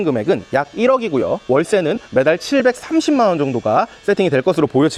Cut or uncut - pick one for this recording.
uncut